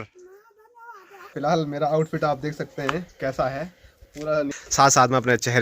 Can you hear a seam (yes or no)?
yes